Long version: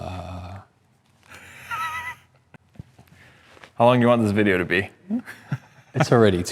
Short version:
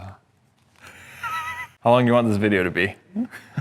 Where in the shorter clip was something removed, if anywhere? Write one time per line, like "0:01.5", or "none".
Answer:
0:01.7